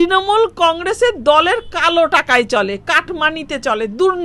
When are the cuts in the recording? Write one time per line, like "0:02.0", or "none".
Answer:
none